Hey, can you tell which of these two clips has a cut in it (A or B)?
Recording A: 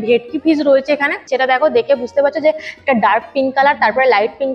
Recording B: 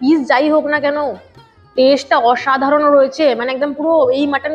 A